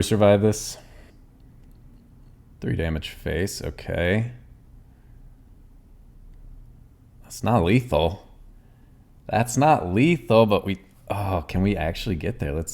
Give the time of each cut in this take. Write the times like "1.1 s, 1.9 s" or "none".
1.1 s